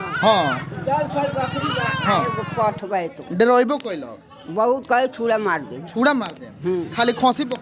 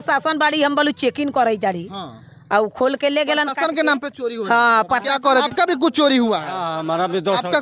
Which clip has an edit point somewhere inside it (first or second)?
second